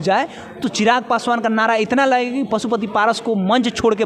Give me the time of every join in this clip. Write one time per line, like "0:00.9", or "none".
none

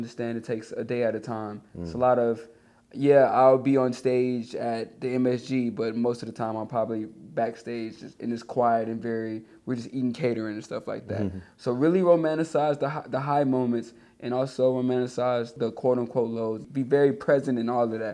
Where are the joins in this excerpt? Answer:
0:15.5
0:16.7

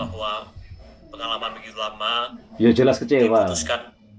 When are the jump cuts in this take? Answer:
none

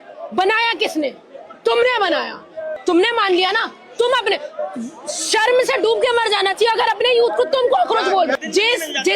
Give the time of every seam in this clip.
0:02.7
0:08.3

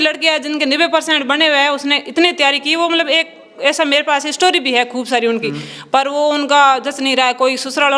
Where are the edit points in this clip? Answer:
none

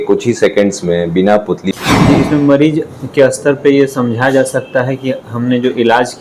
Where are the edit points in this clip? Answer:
0:01.7

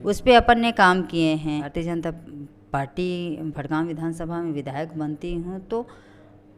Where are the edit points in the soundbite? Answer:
0:01.8

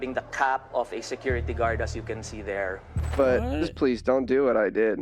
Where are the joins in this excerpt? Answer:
0:03.0

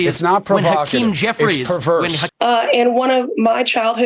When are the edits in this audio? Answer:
0:02.2

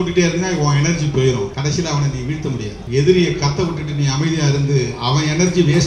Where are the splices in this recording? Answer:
0:01.5
0:02.8

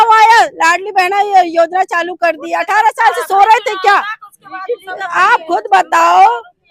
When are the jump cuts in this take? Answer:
none

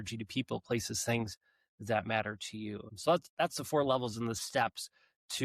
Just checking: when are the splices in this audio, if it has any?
0:02.9

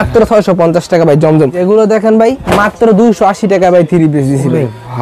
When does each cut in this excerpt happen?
0:01.6

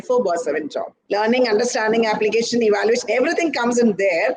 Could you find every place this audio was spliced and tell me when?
0:00.9

